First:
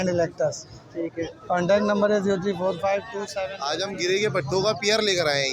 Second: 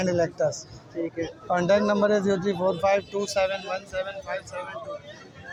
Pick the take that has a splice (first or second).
first